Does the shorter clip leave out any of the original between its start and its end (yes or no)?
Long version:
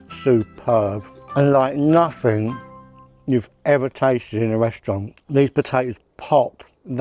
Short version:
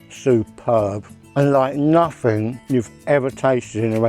yes